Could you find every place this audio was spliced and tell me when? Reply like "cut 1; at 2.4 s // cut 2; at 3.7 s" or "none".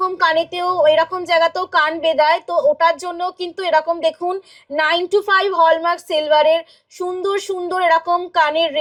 none